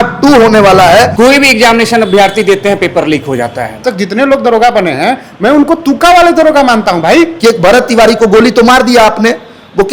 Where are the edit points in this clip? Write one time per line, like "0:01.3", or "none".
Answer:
0:01.1
0:03.9
0:07.3